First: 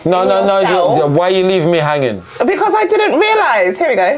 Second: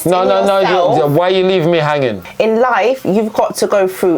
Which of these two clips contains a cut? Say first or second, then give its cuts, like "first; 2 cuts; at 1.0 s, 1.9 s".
second; 1 cut; at 2.2 s